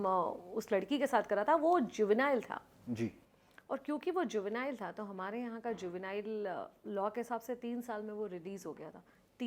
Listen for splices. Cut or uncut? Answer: uncut